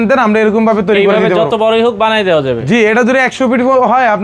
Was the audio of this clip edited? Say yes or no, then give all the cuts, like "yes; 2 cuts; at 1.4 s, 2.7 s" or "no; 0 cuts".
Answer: no; 0 cuts